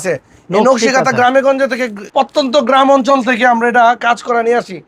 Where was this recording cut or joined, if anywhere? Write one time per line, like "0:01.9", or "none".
none